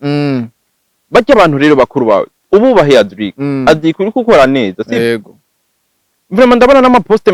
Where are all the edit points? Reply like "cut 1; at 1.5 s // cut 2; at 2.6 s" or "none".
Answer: none